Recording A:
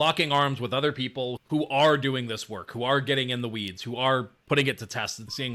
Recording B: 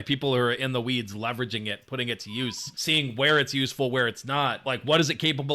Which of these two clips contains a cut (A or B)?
B